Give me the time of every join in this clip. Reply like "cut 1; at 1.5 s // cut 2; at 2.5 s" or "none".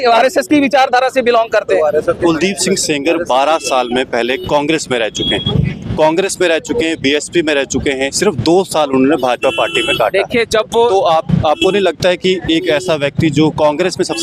none